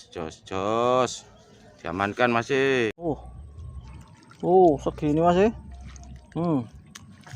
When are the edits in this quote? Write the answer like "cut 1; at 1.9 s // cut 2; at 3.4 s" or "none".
cut 1; at 3.1 s